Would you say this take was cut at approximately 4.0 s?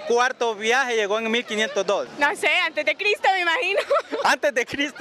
yes; 1 cut; at 4.0 s

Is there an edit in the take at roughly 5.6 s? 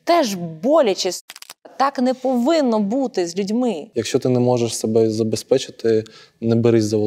no; 1 cut; at 3.8 s

